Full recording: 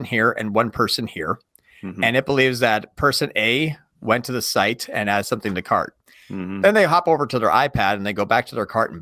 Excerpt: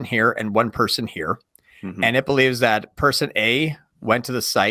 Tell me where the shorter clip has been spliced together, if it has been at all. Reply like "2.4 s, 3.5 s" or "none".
none